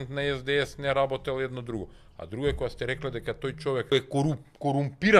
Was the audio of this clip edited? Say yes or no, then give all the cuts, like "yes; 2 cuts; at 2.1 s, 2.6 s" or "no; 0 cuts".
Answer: yes; 1 cut; at 3.9 s